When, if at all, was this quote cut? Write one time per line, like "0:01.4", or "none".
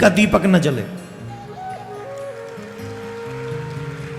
none